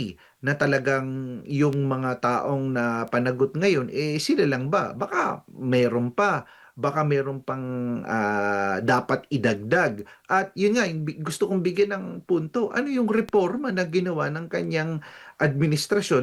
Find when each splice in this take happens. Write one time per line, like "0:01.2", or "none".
none